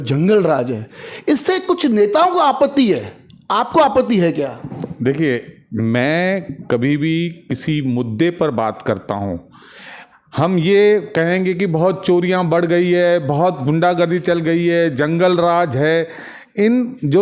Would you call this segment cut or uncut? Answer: uncut